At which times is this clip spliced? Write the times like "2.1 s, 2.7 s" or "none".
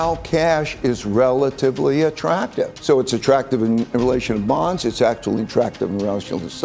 2.8 s